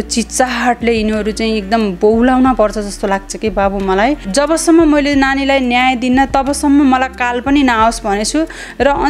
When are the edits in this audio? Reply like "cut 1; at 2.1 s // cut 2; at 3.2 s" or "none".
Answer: cut 1; at 4.2 s

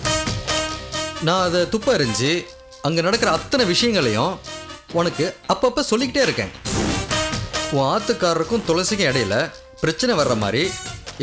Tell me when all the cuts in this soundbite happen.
none

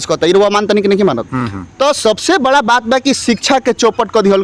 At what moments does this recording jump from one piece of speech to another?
none

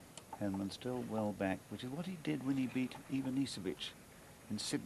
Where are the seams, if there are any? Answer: cut 1; at 2.2 s

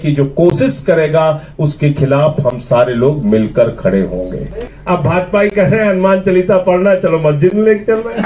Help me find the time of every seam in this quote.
cut 1; at 4.7 s

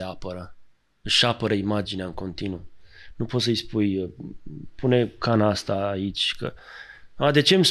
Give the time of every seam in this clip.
none

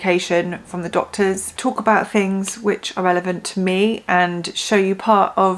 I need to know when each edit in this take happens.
cut 1; at 1.5 s

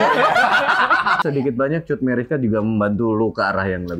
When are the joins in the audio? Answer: cut 1; at 1.2 s

